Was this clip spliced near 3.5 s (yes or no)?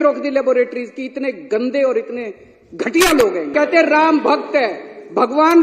yes